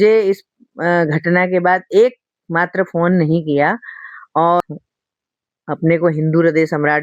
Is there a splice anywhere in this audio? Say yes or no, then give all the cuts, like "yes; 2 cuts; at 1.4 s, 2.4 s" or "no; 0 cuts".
yes; 1 cut; at 4.6 s